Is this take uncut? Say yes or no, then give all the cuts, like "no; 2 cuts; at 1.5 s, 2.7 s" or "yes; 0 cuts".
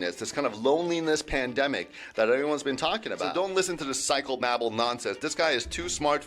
no; 1 cut; at 3.2 s